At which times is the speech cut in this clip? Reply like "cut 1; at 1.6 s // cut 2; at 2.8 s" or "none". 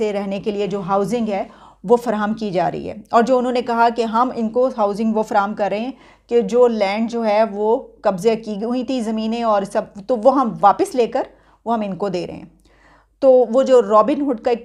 none